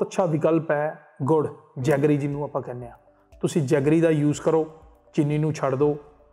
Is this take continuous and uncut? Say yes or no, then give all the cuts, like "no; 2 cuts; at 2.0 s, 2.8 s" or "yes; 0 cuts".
yes; 0 cuts